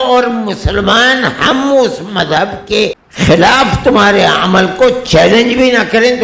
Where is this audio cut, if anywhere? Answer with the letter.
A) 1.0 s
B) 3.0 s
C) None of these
B